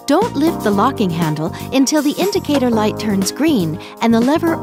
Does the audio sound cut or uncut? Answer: uncut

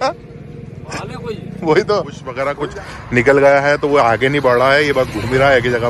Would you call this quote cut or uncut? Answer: cut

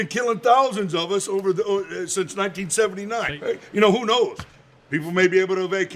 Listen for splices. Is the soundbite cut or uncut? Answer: cut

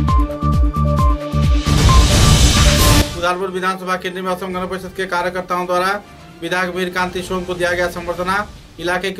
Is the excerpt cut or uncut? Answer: uncut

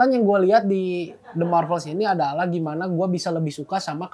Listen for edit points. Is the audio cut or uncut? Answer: uncut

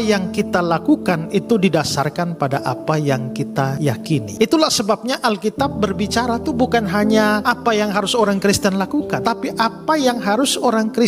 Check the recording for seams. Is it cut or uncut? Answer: uncut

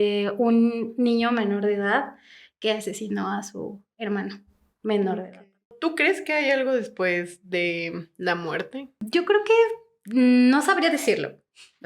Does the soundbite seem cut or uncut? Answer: cut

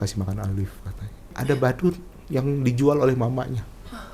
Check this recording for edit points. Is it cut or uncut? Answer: cut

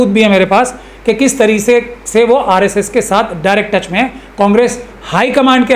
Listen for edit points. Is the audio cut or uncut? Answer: uncut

